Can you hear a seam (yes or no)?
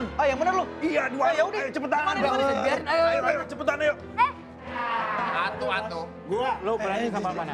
yes